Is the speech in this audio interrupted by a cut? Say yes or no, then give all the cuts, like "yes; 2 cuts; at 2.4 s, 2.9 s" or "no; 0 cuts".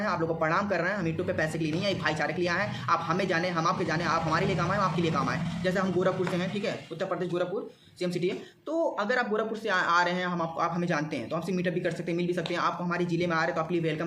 no; 0 cuts